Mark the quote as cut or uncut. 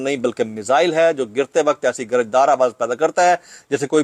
uncut